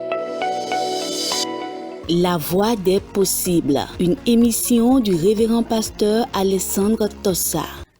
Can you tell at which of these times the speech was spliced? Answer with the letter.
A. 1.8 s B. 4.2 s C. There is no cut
A